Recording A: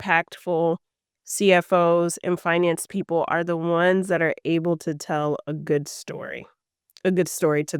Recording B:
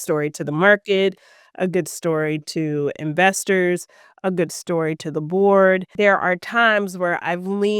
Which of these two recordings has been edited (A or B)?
B